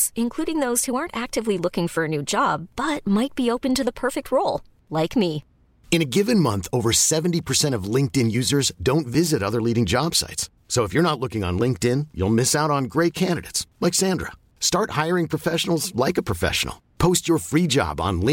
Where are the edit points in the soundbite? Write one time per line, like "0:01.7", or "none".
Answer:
none